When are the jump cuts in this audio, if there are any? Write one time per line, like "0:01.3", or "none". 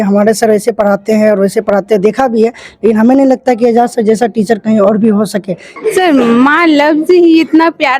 0:05.7